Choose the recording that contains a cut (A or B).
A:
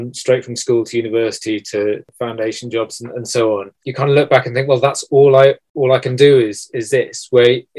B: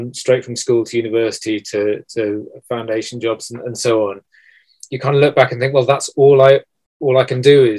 A